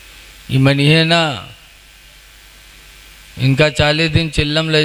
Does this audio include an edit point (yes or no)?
no